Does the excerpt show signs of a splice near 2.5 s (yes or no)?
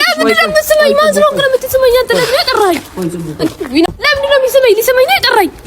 no